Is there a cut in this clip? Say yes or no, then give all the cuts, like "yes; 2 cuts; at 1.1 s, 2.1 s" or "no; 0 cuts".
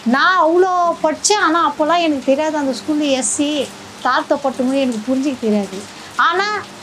no; 0 cuts